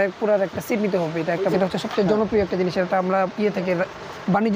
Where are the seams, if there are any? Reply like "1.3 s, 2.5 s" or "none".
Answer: 1.5 s